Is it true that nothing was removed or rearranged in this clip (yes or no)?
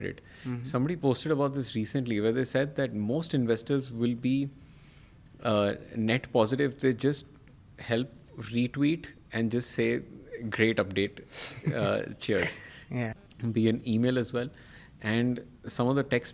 no